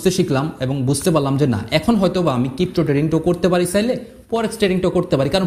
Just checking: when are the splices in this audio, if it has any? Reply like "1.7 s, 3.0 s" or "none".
none